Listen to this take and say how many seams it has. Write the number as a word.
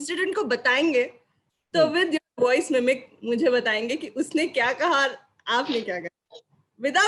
zero